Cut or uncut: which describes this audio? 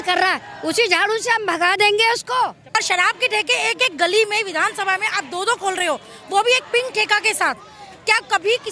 cut